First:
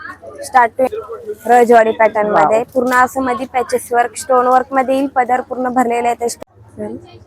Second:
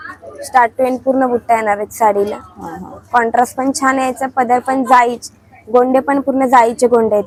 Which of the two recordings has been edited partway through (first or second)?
first